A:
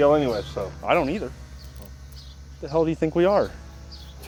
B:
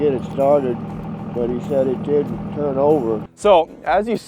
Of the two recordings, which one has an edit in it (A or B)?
B